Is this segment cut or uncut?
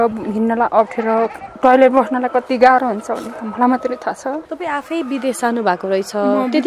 cut